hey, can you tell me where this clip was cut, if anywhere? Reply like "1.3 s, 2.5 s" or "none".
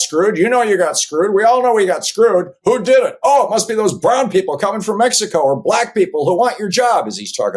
none